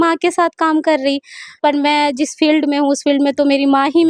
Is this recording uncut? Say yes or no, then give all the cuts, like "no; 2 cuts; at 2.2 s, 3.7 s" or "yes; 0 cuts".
no; 1 cut; at 1.4 s